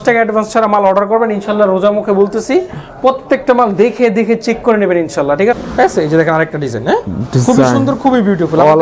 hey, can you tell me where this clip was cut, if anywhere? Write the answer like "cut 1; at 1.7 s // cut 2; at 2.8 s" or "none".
cut 1; at 5.6 s